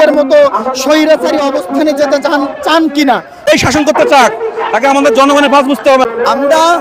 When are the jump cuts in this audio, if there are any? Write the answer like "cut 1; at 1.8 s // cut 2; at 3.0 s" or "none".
cut 1; at 3.5 s // cut 2; at 6.0 s